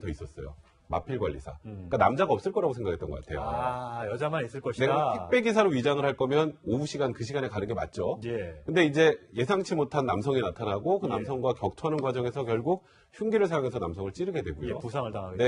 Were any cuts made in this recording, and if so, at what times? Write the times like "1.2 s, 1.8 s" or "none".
4.1 s